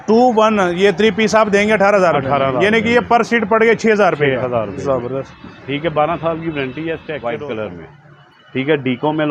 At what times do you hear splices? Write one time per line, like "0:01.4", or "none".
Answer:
0:07.2

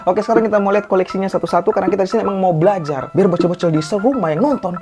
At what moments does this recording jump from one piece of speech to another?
none

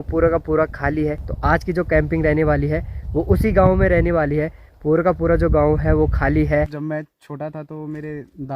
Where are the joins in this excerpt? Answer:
0:01.2
0:06.8

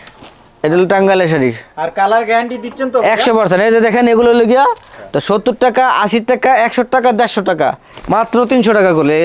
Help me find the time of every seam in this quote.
0:04.9
0:07.9

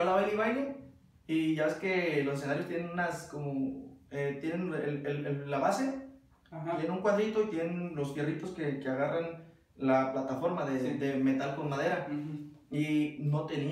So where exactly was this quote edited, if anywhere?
none

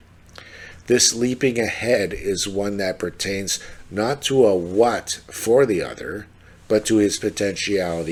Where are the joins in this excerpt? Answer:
none

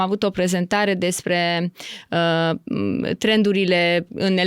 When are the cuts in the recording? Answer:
none

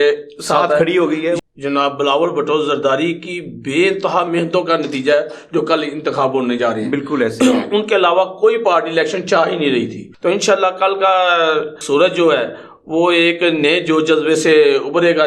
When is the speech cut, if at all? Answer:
0:01.4
0:10.0
0:11.8

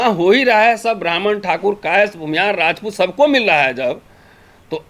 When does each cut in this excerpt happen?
none

